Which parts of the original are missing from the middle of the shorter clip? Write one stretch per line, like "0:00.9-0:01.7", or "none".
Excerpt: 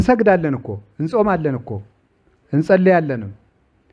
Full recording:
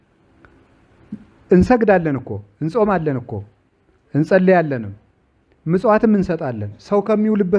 none